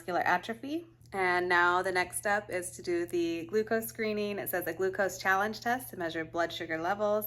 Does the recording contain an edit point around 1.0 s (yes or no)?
yes